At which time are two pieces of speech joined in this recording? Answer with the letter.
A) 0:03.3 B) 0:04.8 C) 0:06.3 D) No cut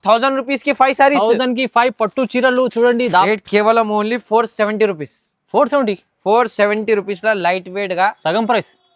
A